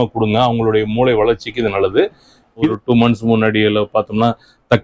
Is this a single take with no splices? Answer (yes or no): no